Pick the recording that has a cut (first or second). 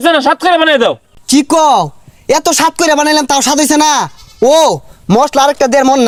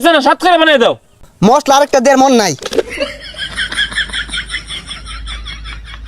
second